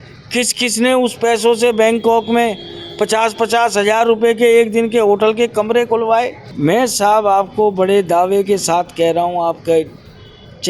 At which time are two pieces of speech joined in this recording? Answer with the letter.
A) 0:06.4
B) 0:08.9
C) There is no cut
A